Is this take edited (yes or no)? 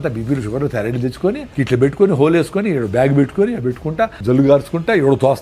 yes